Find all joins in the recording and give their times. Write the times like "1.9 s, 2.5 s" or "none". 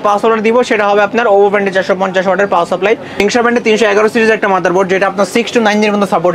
3.2 s